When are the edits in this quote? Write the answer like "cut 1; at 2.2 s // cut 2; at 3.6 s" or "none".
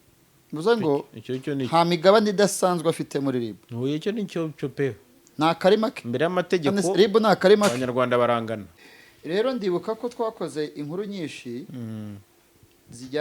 cut 1; at 8.8 s